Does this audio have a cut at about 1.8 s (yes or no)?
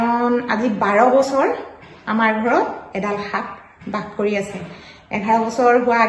no